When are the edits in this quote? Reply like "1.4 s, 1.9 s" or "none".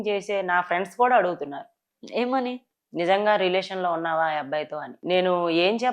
4.9 s